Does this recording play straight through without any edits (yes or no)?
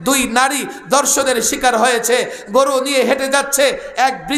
yes